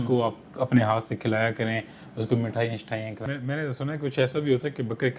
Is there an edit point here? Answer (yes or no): yes